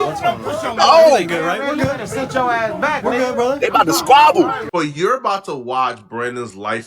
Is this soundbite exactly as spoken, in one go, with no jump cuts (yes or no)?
no